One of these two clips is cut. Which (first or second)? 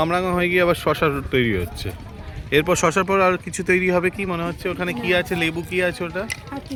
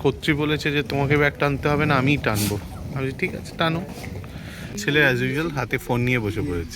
second